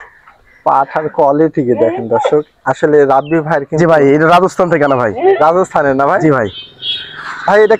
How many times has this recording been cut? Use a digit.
0